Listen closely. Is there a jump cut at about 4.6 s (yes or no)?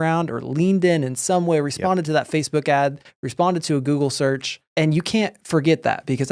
yes